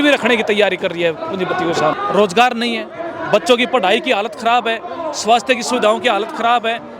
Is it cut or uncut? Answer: cut